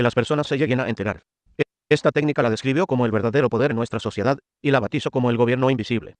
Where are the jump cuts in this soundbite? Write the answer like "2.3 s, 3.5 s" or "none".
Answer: none